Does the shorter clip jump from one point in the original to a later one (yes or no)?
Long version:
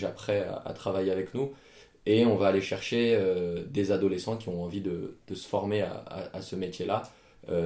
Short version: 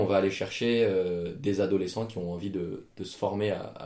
no